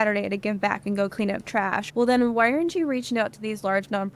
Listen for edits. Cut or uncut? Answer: cut